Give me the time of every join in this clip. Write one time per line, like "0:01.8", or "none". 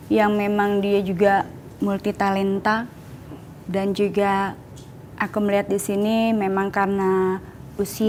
none